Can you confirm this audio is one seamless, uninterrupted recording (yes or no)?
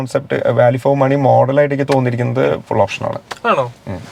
yes